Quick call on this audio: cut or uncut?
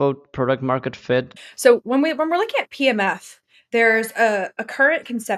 cut